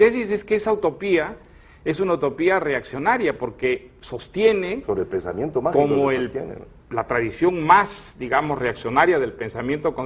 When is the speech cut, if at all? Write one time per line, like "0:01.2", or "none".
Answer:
0:05.8